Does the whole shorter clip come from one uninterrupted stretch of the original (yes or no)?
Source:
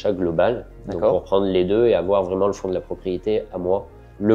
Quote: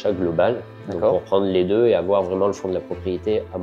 yes